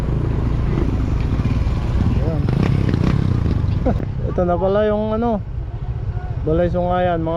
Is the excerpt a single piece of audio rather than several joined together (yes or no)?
no